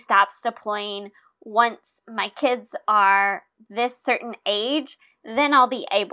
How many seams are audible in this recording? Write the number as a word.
zero